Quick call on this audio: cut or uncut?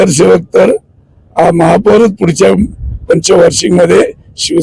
uncut